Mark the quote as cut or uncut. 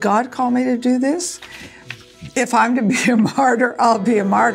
uncut